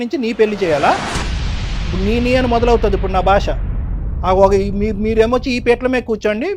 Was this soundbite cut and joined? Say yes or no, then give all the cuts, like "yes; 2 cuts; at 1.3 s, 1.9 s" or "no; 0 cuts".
no; 0 cuts